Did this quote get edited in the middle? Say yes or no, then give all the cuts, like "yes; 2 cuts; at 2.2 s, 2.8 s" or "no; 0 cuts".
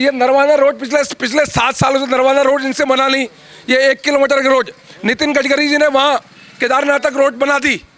no; 0 cuts